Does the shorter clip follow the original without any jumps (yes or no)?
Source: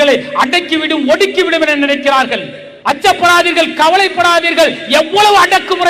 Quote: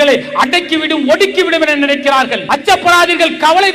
no